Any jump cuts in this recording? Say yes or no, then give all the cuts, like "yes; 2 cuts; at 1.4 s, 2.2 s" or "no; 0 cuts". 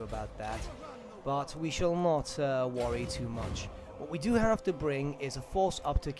yes; 1 cut; at 3.4 s